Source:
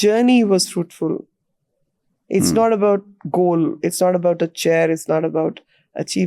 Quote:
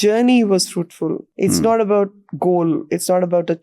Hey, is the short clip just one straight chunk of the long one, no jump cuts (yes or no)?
no